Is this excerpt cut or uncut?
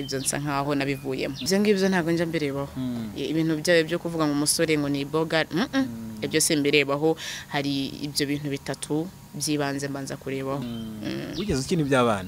cut